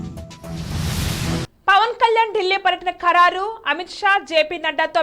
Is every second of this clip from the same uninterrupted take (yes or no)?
yes